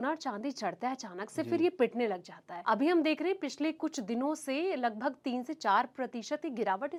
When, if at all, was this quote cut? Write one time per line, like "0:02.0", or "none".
none

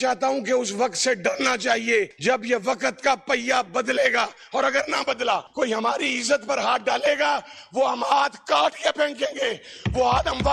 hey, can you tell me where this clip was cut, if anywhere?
0:02.1
0:05.5

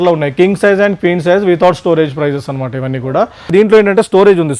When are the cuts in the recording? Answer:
0:03.5

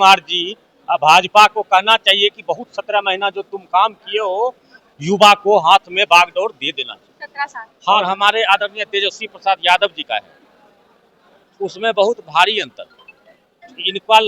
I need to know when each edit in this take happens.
0:07.9

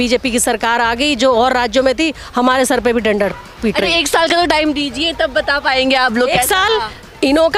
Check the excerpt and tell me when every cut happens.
none

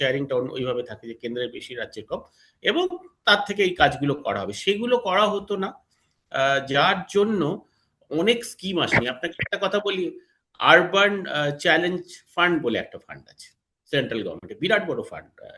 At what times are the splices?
none

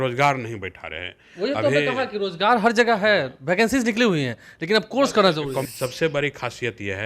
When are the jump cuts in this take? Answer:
0:05.7

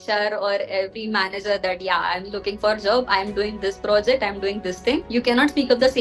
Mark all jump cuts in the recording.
0:05.1

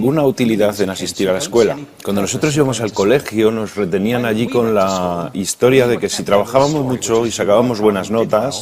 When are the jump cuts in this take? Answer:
none

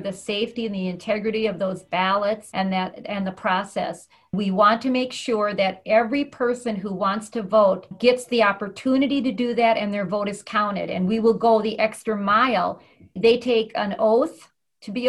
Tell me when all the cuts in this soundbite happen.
0:02.5
0:04.3
0:07.9
0:13.1

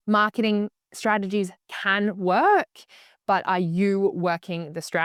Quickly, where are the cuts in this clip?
none

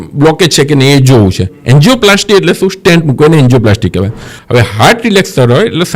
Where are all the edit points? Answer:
0:04.3

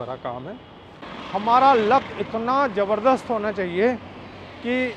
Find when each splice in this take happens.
0:01.1

